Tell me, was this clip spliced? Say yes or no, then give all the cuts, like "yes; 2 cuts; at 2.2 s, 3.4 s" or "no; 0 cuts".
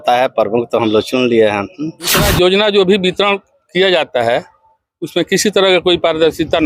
yes; 1 cut; at 2.2 s